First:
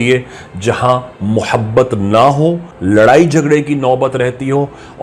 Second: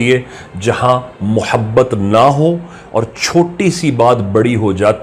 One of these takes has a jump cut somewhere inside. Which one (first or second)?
first